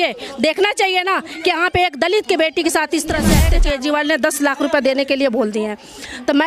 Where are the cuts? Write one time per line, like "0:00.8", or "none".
0:03.4